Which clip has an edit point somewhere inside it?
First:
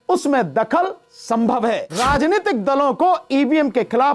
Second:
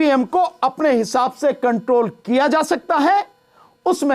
first; 1 cut; at 1.9 s

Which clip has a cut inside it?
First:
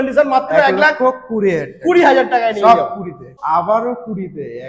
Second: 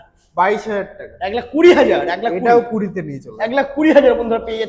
first; 1 cut; at 3.3 s

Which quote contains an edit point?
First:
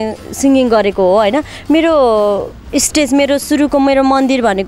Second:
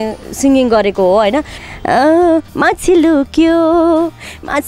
second; 1 cut; at 1.5 s

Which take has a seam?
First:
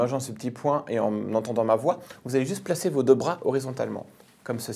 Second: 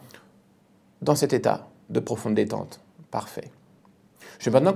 second; 1 cut; at 1.0 s

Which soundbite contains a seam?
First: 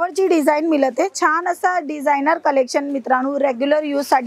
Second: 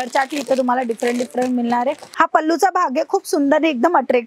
second; 1 cut; at 2.0 s

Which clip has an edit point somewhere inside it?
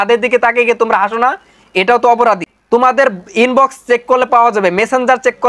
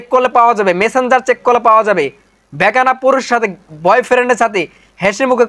first; 1 cut; at 2.5 s

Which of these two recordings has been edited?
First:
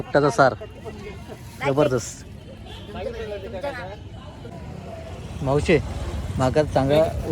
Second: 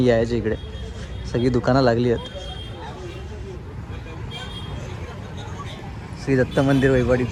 first; 1 cut; at 4.5 s

